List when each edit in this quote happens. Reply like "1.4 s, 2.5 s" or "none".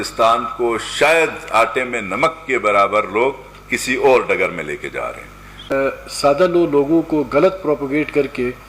5.7 s